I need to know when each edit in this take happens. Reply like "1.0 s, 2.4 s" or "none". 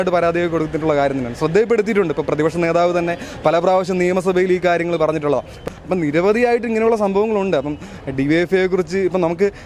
5.7 s